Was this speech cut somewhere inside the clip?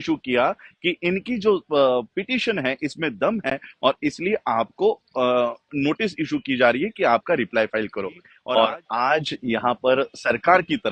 yes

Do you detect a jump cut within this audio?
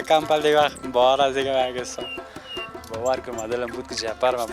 no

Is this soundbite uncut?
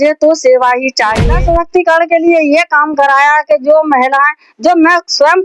no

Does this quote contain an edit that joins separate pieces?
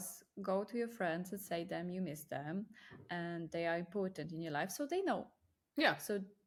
no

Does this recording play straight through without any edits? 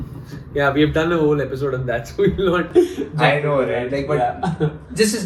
yes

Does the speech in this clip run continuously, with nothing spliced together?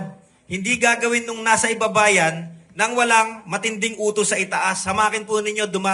yes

